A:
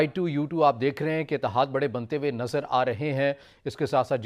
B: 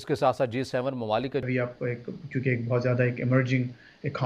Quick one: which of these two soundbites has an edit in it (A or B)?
B